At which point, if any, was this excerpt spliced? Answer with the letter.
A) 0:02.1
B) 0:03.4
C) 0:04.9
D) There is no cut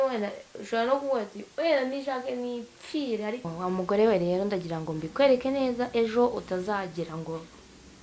B